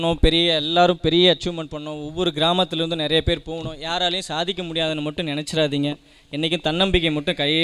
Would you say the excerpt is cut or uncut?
uncut